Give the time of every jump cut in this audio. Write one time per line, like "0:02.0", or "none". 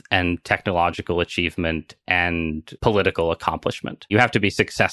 0:02.7
0:04.0